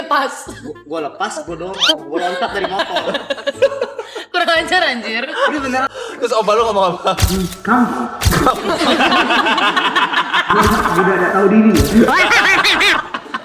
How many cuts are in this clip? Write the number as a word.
one